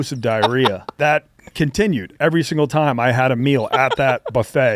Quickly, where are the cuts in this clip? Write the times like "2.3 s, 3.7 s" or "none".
0.9 s